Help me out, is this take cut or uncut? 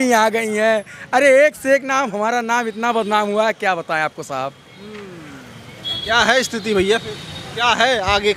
uncut